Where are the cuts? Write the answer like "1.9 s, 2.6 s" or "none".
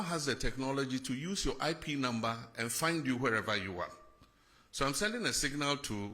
4.0 s